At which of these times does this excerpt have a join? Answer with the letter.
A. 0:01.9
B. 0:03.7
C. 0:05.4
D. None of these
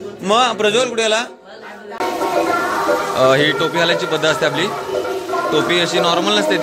A